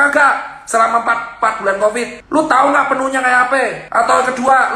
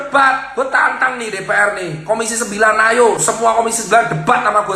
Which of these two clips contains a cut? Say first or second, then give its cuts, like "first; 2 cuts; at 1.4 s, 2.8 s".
first; 2 cuts; at 2.2 s, 3.8 s